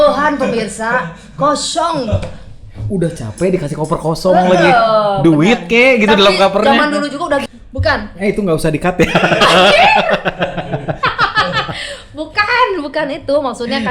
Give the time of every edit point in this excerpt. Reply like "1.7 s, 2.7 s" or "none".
7.4 s